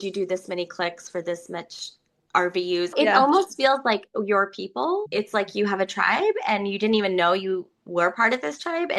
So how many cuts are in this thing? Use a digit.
1